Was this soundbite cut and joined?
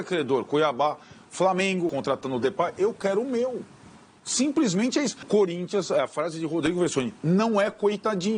yes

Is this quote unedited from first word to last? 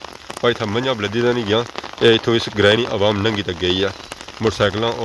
yes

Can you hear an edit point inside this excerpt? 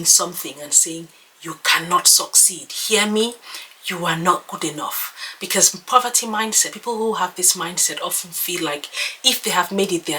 no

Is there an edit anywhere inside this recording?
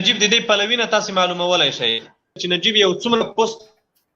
yes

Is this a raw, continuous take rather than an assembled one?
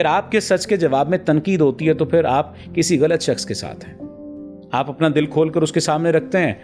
yes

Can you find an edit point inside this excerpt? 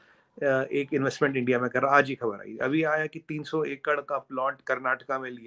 no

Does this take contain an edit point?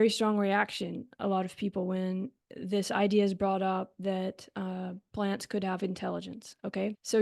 no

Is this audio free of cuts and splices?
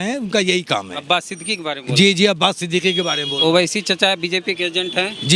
yes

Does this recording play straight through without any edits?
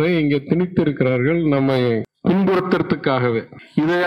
no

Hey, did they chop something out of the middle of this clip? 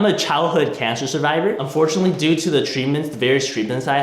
yes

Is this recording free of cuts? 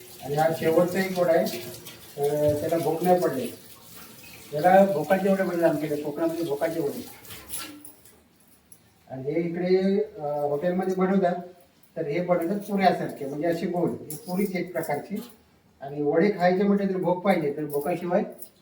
yes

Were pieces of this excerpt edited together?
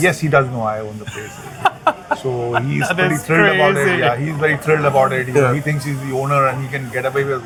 no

